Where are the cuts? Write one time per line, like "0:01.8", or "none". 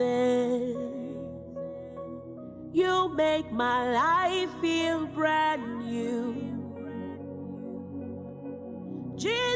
none